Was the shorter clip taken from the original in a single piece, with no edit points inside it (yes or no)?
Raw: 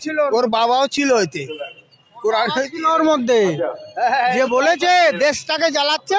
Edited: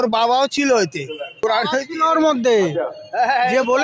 no